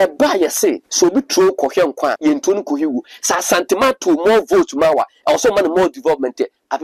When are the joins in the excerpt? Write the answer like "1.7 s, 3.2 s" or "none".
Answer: 0.9 s, 2.2 s